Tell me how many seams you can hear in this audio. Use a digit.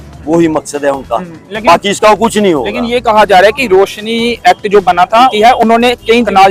0